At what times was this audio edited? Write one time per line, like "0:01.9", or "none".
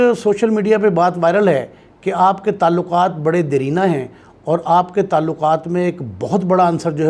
none